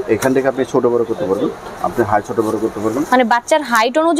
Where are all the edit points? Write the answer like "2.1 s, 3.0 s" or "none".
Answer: none